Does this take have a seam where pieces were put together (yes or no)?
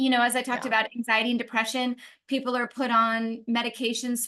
no